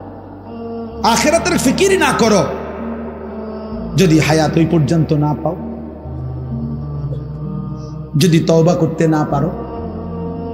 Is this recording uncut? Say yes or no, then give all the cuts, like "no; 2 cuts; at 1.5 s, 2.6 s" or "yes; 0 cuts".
no; 1 cut; at 9.6 s